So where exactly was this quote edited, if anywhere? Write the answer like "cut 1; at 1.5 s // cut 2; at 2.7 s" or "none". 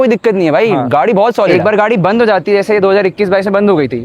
cut 1; at 1.5 s